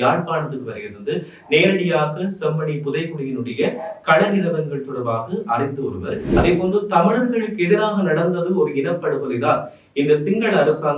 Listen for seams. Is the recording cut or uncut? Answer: cut